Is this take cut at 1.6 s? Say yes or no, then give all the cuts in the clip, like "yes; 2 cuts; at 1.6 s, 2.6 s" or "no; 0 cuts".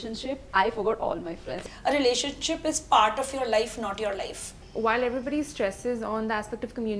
yes; 2 cuts; at 1.6 s, 4.5 s